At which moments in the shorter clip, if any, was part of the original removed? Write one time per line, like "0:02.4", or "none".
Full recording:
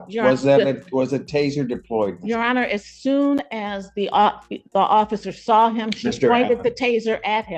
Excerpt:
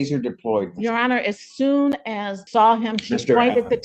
0:02.4